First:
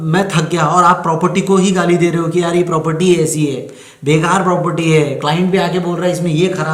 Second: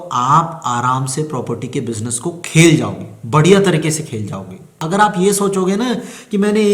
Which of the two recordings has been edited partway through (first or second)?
second